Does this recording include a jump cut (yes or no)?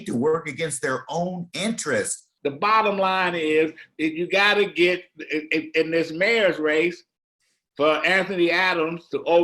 yes